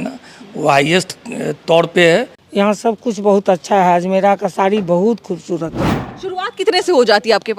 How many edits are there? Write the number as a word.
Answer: two